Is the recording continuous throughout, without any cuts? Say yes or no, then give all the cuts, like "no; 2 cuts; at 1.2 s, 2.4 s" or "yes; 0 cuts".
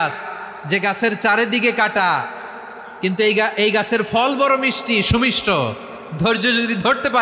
yes; 0 cuts